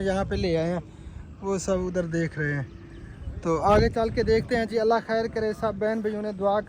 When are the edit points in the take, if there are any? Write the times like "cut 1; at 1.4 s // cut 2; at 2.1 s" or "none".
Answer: none